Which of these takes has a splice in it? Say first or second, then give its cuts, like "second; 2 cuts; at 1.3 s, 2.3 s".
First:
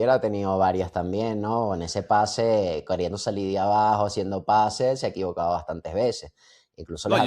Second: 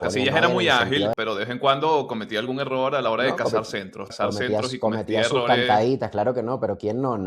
second; 2 cuts; at 1.1 s, 4.1 s